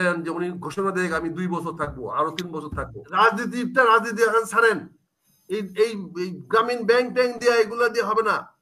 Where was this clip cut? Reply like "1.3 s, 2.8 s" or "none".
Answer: 3.0 s

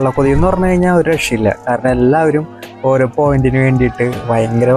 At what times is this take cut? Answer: none

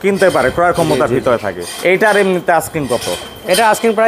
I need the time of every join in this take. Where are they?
none

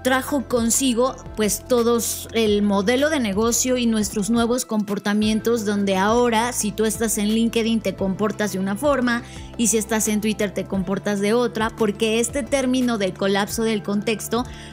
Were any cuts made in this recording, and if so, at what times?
none

